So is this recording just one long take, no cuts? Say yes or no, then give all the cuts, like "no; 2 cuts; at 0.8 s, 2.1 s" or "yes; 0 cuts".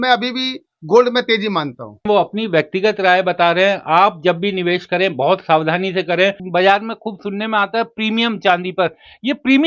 no; 2 cuts; at 2.0 s, 6.4 s